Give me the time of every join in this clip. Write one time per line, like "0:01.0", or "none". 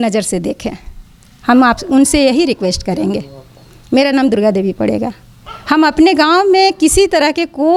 none